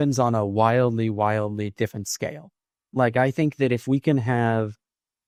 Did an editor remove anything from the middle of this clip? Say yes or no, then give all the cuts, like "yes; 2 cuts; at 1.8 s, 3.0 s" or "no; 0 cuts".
no; 0 cuts